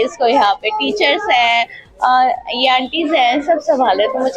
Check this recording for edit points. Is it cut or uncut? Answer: uncut